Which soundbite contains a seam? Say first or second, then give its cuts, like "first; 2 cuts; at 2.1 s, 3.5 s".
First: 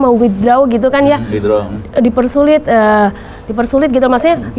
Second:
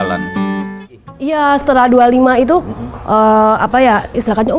second; 1 cut; at 1.2 s